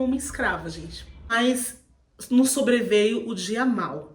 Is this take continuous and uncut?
no; 1 cut; at 1.3 s

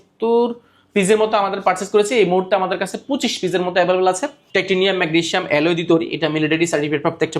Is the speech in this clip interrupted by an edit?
yes; 1 cut; at 4.3 s

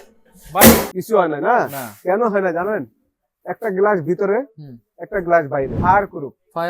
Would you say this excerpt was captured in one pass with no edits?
no; 2 cuts; at 0.9 s, 5.8 s

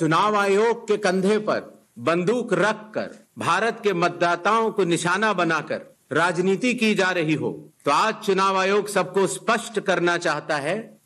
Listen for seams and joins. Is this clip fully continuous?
yes; 0 cuts

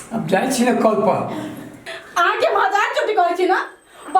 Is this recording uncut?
no; 1 cut; at 1.9 s

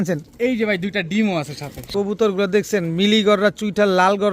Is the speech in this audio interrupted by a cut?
yes; 1 cut; at 1.9 s

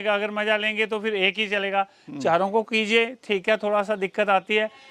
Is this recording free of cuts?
yes; 0 cuts

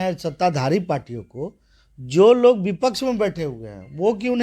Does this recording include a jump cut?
no; 0 cuts

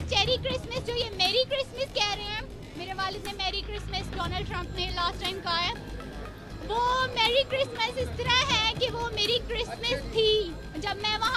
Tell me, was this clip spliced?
no; 0 cuts

